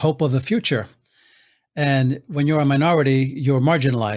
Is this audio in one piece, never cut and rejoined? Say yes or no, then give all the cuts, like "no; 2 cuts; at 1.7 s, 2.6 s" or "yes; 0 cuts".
yes; 0 cuts